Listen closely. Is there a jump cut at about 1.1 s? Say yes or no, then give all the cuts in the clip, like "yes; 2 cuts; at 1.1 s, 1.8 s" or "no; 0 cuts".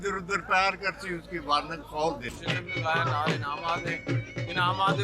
no; 1 cut; at 2.4 s